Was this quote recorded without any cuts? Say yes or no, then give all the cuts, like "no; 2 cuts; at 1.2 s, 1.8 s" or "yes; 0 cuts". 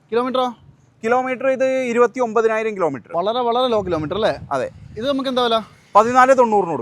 yes; 0 cuts